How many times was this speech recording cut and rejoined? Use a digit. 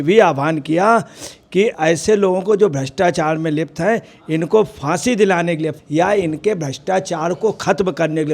2